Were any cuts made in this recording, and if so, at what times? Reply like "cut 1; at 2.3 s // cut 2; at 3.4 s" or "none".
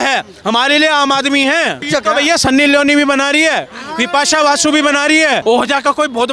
cut 1; at 1.9 s // cut 2; at 5.4 s